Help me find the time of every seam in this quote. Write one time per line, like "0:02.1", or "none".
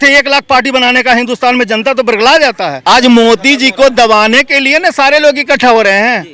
0:02.7